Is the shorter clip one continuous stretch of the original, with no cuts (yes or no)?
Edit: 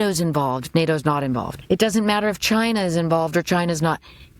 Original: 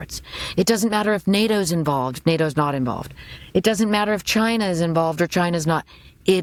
no